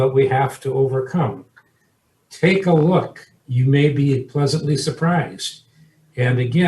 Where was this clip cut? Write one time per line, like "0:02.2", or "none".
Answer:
none